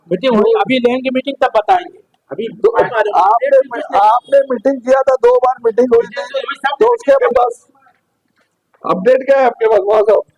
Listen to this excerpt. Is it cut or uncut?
cut